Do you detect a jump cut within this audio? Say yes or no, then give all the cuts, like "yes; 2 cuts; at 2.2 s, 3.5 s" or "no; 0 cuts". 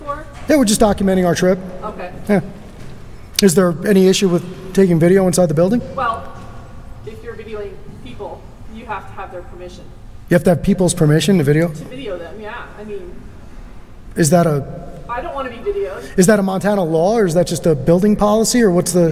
no; 0 cuts